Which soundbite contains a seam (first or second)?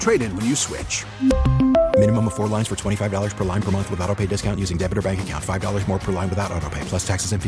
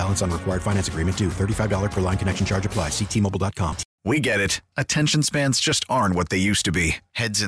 second